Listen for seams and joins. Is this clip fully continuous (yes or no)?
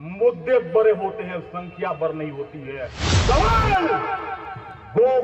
no